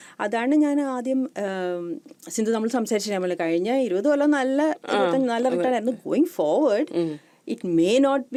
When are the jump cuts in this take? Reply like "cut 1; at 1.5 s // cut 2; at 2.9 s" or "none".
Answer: none